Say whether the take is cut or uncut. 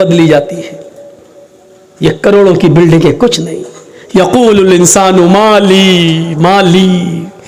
uncut